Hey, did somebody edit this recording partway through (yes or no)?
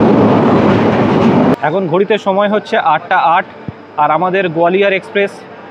yes